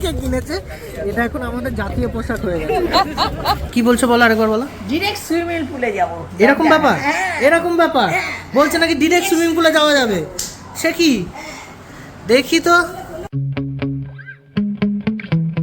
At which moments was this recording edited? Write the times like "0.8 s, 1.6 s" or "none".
3.6 s, 13.2 s